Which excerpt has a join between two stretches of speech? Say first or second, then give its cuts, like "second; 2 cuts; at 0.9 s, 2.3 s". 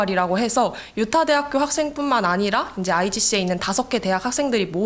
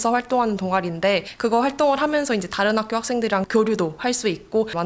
second; 1 cut; at 3.5 s